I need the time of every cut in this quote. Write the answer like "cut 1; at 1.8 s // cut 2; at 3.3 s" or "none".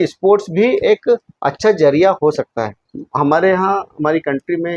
cut 1; at 2.8 s